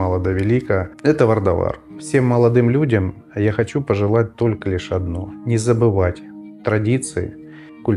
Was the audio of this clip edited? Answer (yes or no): yes